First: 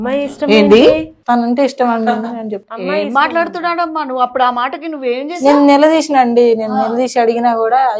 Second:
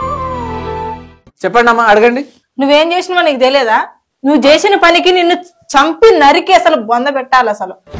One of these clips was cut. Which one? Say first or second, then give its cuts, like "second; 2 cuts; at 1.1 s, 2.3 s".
second; 2 cuts; at 1.2 s, 2.3 s